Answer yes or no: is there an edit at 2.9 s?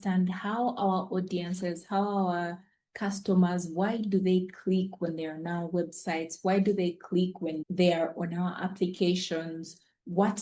no